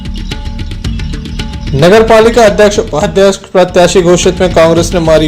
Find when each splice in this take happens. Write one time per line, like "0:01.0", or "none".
0:01.7